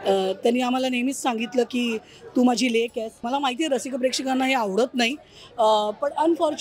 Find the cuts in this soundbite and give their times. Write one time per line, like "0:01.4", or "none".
0:03.2